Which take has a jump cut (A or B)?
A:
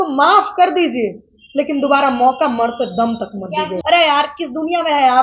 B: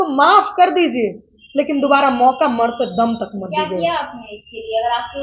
A